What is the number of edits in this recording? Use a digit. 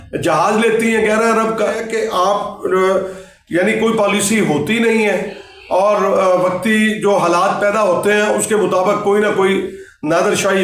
1